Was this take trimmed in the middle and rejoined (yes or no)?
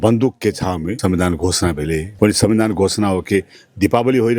yes